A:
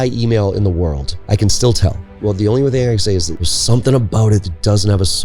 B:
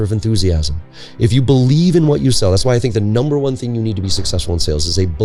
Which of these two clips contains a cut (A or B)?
A